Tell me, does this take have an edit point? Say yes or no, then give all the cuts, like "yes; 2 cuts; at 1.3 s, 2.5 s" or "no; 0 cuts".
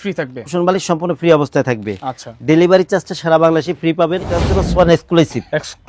yes; 1 cut; at 4.6 s